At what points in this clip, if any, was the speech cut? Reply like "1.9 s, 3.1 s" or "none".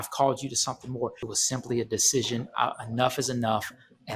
1.3 s